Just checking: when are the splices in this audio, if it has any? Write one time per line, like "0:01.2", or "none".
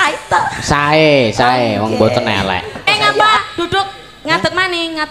0:02.9